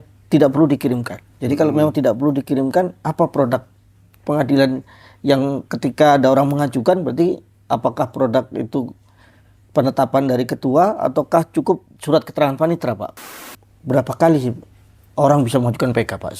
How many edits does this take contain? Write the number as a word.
one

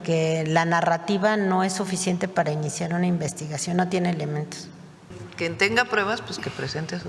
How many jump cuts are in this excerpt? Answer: one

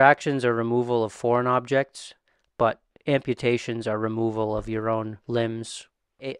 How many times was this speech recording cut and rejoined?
one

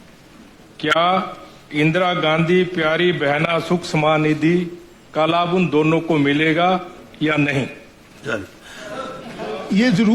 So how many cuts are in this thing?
one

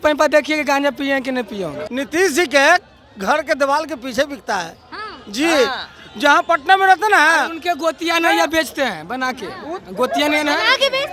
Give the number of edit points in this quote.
one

